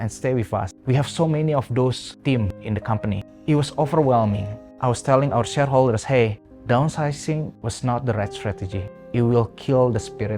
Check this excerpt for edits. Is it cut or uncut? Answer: uncut